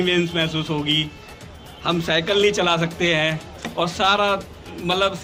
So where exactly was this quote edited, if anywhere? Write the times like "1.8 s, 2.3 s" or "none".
none